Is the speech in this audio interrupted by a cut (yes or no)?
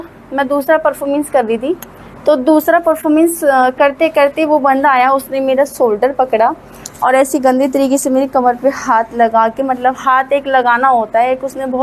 no